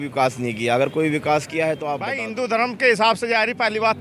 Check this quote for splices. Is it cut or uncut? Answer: cut